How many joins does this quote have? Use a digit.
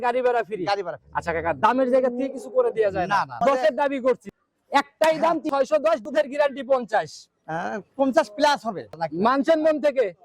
2